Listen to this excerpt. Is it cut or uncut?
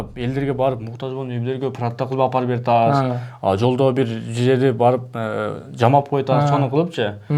uncut